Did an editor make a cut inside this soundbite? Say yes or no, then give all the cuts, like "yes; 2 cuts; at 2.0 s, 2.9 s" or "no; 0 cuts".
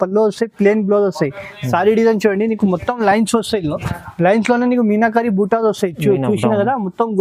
no; 0 cuts